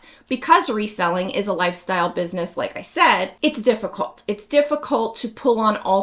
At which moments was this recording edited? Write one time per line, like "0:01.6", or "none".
0:03.3